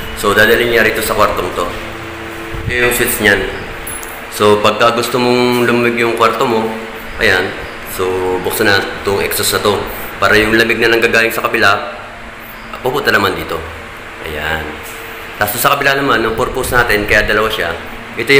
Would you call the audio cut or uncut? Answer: cut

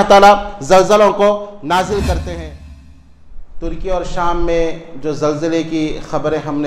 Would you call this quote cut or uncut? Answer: cut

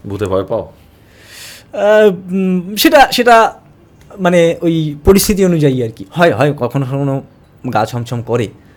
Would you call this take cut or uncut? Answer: uncut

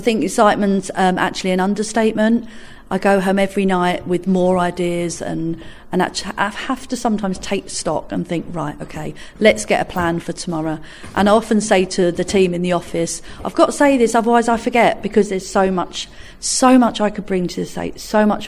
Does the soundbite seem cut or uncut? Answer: uncut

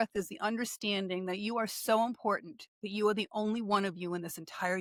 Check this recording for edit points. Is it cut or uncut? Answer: uncut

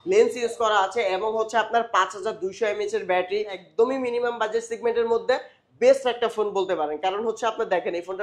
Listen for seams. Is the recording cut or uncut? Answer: cut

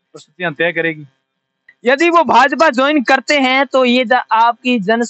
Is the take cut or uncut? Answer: cut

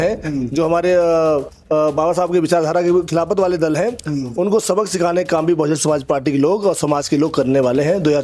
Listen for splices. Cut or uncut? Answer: uncut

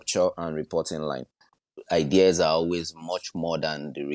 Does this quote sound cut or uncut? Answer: cut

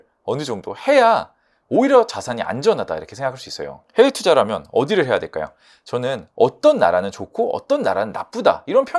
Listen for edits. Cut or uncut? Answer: uncut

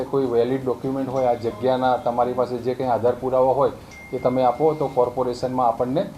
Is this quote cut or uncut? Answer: uncut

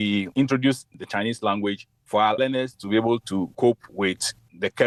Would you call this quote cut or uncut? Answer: uncut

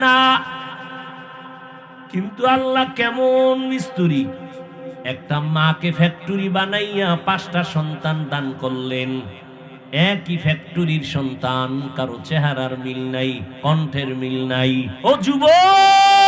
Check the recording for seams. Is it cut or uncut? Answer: cut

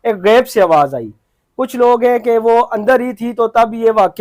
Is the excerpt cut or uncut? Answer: uncut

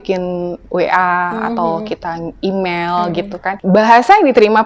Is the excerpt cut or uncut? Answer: cut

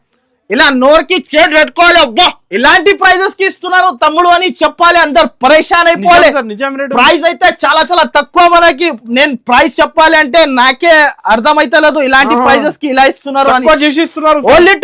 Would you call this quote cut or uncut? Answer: uncut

